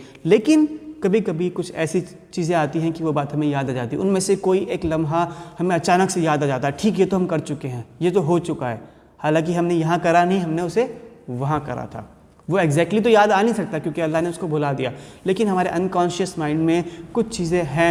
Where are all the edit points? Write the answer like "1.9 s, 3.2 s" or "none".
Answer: none

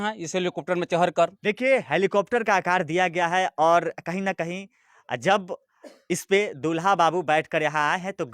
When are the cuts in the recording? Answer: 1.4 s

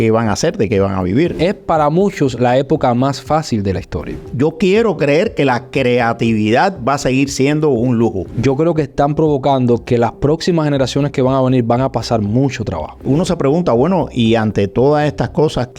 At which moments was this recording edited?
1.3 s, 4.2 s, 8.2 s, 13.0 s

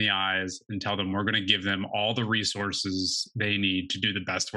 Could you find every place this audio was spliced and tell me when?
none

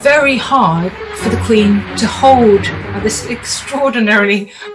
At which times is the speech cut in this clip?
none

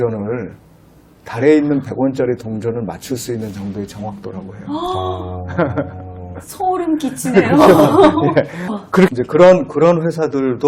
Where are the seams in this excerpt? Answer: 9.1 s

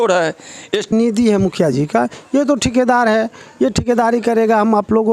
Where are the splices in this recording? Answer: 0.9 s

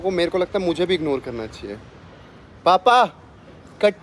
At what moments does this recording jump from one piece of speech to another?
none

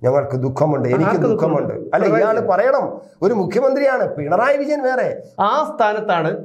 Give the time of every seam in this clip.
5.2 s

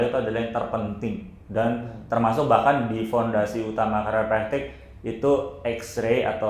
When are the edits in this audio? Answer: none

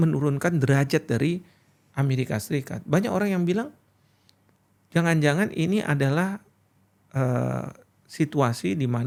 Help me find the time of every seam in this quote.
none

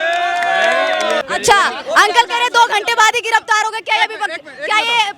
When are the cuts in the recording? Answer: 1.2 s

